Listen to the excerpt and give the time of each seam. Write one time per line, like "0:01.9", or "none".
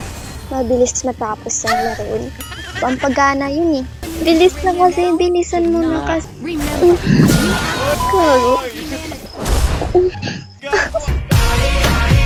none